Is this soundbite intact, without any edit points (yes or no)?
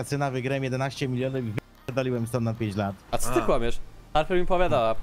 yes